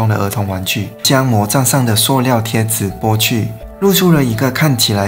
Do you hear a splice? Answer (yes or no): yes